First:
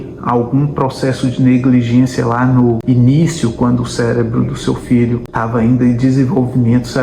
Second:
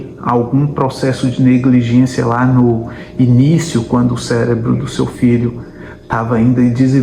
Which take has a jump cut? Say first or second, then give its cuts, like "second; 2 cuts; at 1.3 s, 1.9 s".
first; 2 cuts; at 2.8 s, 5.3 s